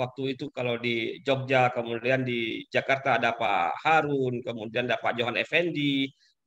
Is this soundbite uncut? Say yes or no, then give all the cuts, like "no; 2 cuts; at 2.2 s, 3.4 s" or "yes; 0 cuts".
yes; 0 cuts